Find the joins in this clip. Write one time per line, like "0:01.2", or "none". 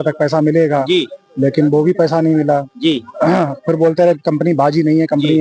none